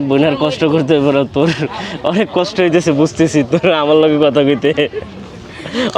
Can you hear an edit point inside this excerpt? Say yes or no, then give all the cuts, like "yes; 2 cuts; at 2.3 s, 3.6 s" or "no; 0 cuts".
no; 0 cuts